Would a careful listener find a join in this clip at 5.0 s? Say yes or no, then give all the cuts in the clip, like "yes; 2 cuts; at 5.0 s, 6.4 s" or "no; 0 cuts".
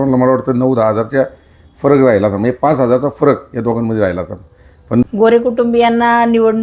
yes; 1 cut; at 5.0 s